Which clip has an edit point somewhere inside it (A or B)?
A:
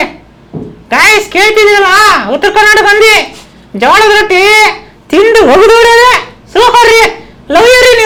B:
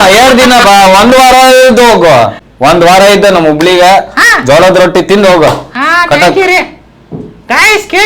B